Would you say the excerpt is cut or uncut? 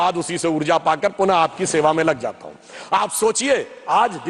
uncut